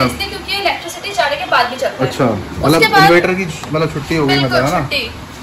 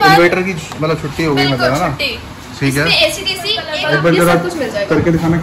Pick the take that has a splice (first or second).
second